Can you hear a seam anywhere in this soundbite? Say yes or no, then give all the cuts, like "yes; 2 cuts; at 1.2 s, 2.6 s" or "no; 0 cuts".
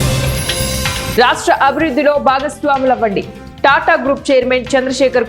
yes; 1 cut; at 1.1 s